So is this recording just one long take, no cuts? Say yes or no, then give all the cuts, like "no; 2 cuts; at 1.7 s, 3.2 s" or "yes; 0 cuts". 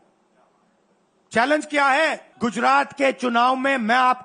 no; 1 cut; at 2.3 s